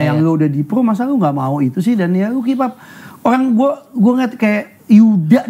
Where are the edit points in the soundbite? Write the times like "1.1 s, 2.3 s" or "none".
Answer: none